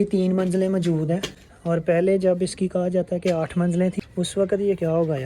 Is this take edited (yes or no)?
yes